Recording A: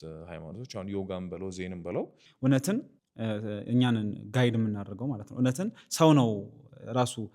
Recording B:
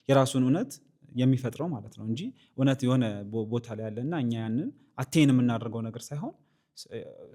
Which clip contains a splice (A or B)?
A